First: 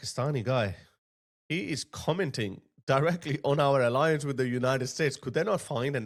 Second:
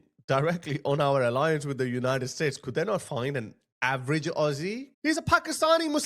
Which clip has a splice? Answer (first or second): second